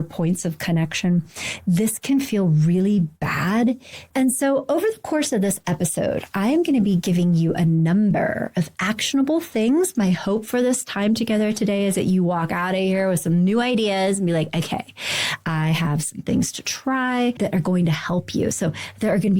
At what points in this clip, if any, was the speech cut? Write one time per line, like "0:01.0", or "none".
0:03.9
0:17.4